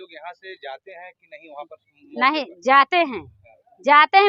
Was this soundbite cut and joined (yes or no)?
no